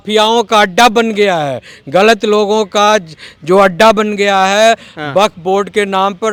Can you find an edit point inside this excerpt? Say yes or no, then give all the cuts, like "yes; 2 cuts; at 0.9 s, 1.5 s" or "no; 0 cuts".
no; 0 cuts